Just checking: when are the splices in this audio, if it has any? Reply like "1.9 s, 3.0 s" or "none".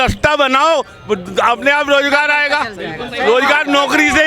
none